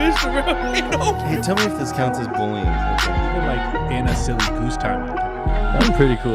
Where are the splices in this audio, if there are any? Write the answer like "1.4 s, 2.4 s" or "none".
none